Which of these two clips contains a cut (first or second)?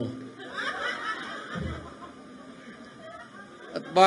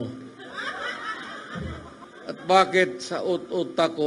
second